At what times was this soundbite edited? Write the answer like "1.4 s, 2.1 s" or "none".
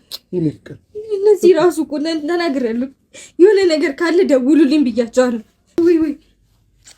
5.8 s